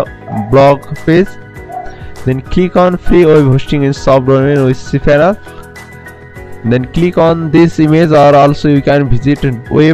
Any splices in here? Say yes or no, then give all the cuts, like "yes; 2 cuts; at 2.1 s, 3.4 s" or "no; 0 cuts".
no; 0 cuts